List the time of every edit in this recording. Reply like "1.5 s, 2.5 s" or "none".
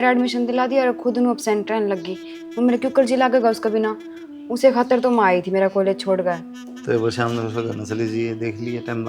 none